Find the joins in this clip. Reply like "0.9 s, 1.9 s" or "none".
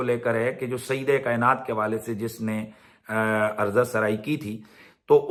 none

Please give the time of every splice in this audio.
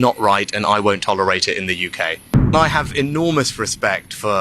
2.5 s

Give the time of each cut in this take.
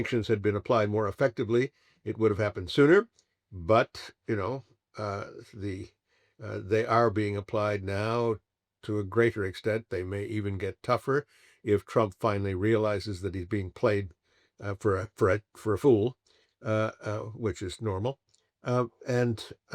none

